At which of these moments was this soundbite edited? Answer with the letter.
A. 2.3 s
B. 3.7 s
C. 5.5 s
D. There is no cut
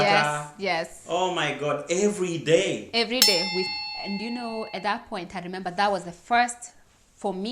B